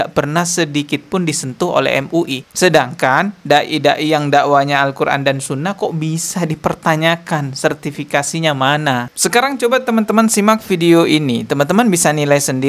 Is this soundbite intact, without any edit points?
no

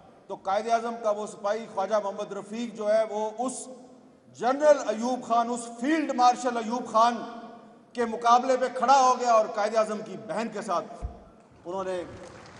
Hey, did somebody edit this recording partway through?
no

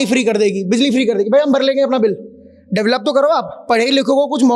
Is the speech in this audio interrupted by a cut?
no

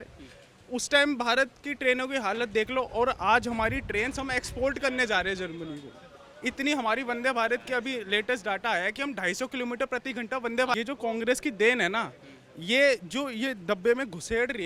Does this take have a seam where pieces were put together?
no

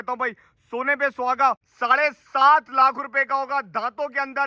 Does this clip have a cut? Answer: yes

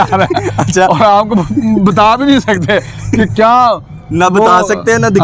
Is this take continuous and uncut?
yes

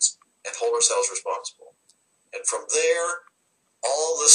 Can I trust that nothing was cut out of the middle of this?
yes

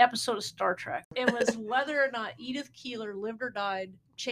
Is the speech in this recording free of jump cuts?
no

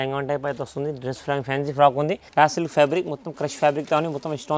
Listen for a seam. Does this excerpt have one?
yes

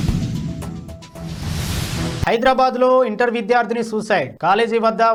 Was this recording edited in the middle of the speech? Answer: no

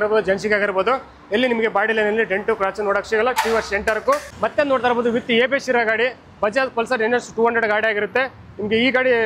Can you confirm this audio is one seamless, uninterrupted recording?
no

